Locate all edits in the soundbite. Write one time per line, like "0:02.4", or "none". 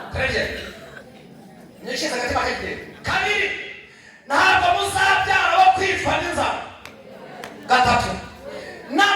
0:02.9